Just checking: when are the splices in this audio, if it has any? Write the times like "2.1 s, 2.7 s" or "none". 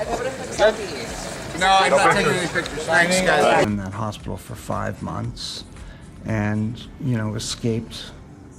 none